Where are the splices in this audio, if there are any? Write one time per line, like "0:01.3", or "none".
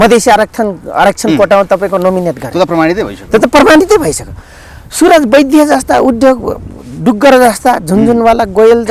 none